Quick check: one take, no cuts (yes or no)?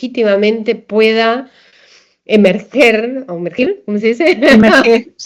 yes